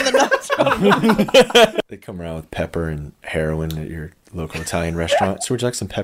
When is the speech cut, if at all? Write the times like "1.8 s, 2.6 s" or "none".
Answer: 1.7 s